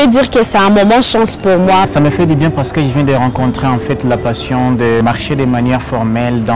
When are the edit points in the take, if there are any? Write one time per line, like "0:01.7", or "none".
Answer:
0:01.9
0:05.0